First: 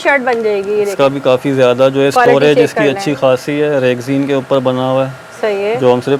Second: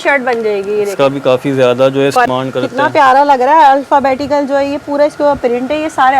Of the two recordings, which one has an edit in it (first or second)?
second